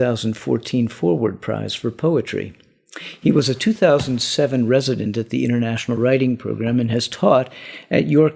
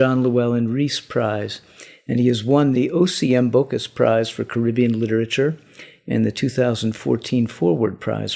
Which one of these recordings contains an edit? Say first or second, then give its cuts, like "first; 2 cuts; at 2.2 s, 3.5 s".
second; 1 cut; at 2.4 s